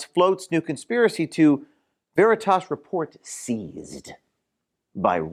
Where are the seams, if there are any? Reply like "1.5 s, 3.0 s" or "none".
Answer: none

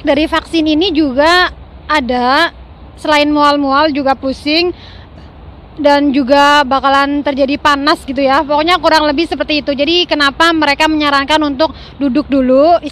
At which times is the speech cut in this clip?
none

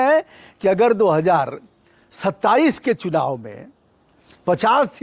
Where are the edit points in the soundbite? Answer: none

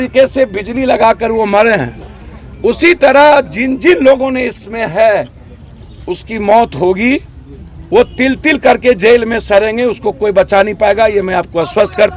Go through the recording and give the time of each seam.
none

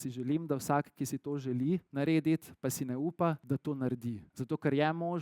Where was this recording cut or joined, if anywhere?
1.9 s, 3.4 s, 4.3 s

